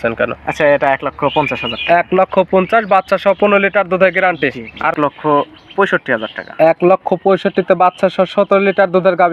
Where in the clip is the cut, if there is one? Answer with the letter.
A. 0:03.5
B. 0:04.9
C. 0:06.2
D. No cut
B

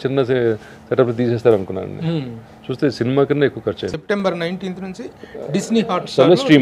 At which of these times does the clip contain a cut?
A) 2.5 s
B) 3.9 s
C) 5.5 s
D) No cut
B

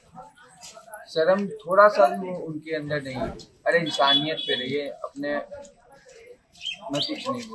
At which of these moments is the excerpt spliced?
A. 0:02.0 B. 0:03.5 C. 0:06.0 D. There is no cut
B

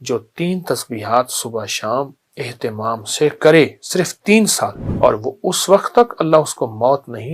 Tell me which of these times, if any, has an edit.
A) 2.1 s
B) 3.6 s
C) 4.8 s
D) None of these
C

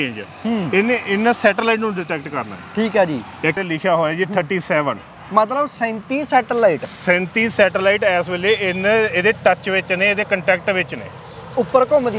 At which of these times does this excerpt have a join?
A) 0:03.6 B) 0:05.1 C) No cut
A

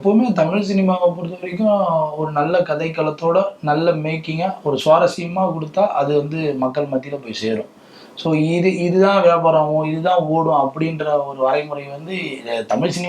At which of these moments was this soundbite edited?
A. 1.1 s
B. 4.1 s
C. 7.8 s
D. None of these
D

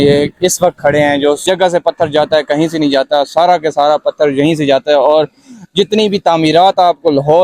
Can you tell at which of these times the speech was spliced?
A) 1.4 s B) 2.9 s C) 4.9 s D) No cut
A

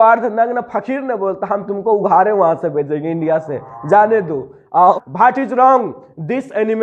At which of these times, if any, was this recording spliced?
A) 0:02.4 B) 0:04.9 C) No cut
B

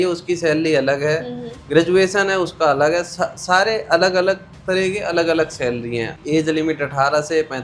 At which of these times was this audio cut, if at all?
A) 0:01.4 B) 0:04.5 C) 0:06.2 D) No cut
C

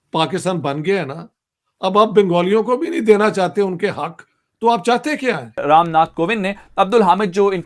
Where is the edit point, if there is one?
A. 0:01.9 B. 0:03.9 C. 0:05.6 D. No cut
C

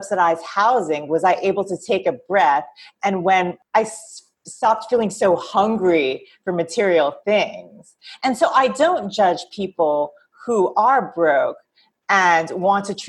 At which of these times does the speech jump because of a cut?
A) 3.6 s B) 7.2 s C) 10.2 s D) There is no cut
A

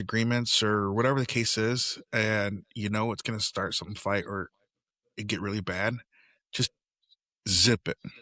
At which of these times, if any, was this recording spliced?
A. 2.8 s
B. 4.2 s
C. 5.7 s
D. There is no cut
D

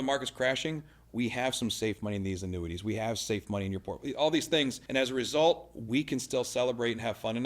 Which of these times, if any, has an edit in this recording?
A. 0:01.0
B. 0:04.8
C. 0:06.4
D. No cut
B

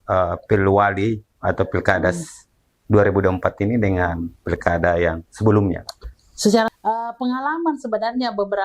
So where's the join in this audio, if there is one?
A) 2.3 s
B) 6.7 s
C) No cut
B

